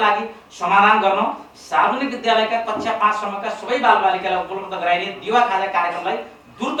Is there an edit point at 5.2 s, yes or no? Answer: no